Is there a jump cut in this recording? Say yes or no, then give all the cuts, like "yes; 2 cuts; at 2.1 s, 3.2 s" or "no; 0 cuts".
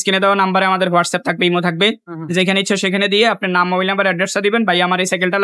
no; 0 cuts